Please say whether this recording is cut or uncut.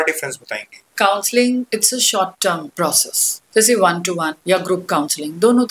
cut